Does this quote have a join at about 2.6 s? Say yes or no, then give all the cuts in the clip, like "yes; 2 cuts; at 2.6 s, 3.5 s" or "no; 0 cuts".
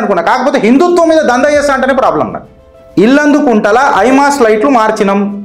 yes; 1 cut; at 2.6 s